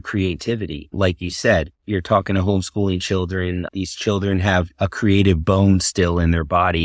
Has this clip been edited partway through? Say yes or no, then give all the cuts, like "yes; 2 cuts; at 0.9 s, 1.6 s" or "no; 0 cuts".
yes; 2 cuts; at 0.9 s, 1.8 s